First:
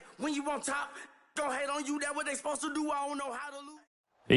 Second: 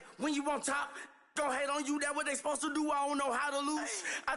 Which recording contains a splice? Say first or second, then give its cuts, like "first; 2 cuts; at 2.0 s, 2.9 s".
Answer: second; 1 cut; at 3.5 s